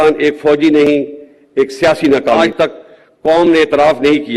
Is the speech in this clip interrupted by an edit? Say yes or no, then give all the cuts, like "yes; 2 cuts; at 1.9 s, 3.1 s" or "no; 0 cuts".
yes; 1 cut; at 2.5 s